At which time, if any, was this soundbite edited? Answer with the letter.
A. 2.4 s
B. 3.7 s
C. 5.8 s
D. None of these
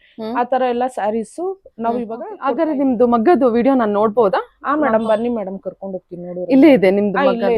A